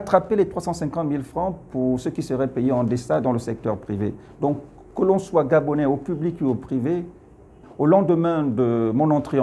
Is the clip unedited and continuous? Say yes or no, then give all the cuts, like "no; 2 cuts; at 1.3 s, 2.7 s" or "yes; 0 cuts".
no; 1 cut; at 7.6 s